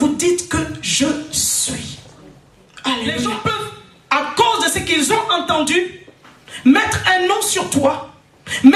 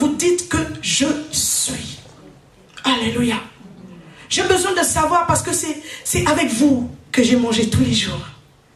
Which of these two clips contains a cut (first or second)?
first